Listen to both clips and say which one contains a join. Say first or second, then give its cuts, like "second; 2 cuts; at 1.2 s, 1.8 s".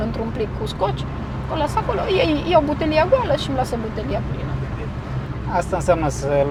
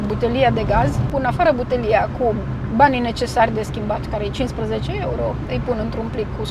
second; 1 cut; at 1.0 s